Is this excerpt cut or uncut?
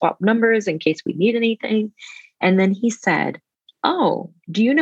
uncut